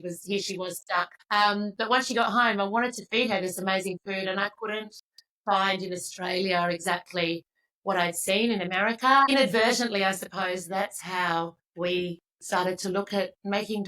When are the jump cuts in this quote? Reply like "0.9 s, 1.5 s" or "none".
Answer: 1.2 s, 9.3 s, 11.6 s